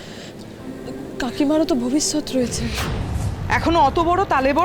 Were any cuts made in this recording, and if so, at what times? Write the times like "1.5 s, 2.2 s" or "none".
2.8 s